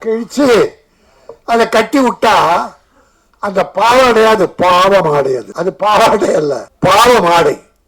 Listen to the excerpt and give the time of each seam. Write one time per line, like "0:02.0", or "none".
0:05.5
0:06.7